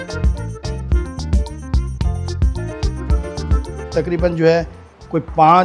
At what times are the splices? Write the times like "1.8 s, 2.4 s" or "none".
3.9 s